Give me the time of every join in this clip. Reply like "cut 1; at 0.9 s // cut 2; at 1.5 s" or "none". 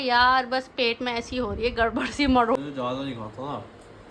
cut 1; at 2.6 s